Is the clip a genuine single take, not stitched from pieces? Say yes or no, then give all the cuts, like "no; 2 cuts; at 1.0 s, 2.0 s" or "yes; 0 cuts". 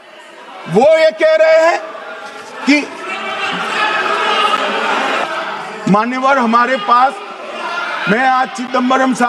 no; 1 cut; at 5.2 s